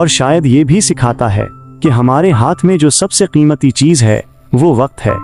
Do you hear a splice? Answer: no; 0 cuts

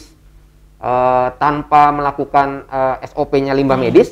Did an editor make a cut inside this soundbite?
no; 0 cuts

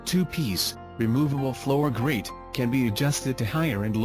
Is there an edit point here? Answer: no; 0 cuts

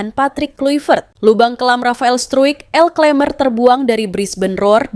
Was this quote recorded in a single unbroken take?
no; 1 cut; at 1.1 s

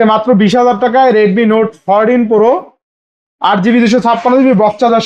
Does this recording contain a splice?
no; 0 cuts

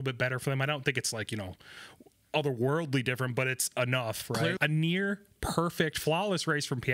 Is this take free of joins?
no; 1 cut; at 4.6 s

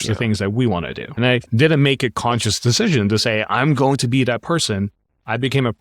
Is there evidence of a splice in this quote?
yes; 1 cut; at 1.3 s

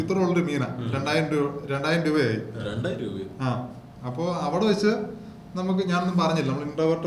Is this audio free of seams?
yes; 0 cuts

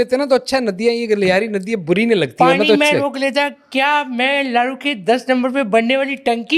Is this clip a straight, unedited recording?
yes; 0 cuts

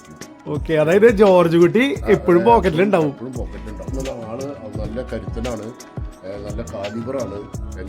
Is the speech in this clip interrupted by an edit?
yes; 1 cut; at 3.9 s

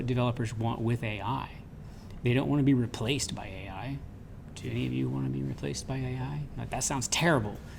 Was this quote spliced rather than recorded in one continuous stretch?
no; 0 cuts

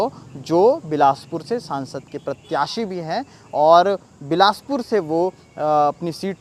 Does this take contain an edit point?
no; 0 cuts

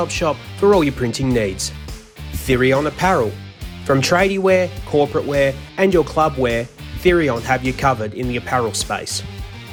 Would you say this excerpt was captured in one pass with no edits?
yes; 0 cuts

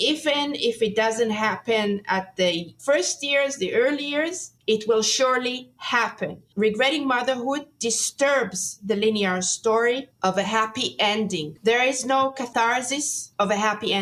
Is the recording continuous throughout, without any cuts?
no; 2 cuts; at 11.5 s, 12.5 s

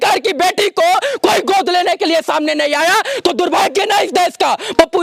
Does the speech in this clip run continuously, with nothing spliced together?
yes; 0 cuts

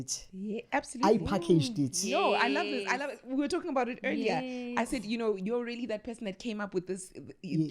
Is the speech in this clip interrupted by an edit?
no; 0 cuts

